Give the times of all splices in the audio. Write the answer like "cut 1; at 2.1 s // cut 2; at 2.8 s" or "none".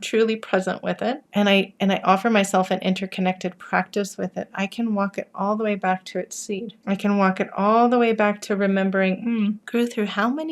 cut 1; at 1.2 s // cut 2; at 9.6 s